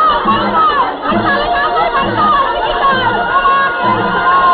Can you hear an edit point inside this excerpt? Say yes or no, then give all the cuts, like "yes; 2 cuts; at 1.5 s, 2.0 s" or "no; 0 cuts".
no; 0 cuts